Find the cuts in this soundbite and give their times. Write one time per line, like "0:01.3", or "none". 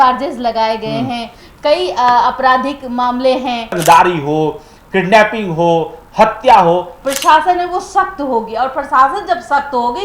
0:03.8
0:07.0